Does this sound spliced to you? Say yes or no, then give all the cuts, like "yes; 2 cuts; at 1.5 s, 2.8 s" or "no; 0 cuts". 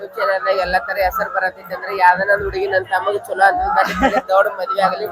no; 0 cuts